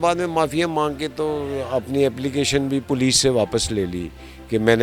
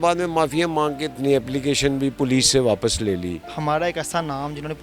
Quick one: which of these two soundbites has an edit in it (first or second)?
second